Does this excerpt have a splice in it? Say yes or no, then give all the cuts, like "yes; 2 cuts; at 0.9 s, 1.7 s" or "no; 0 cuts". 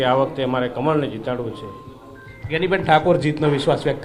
no; 0 cuts